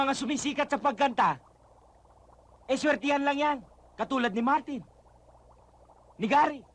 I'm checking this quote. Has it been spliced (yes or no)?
yes